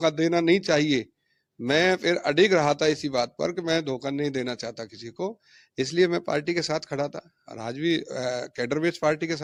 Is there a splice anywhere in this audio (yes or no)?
no